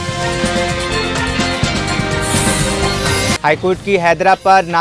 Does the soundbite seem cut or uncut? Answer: cut